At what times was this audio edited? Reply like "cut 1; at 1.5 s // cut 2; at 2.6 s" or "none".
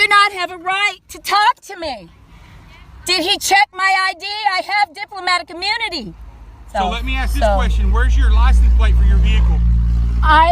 cut 1; at 6.7 s